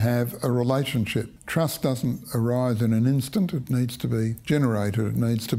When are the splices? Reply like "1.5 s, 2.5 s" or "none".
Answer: 4.4 s